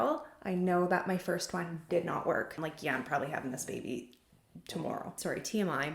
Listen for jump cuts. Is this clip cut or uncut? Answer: cut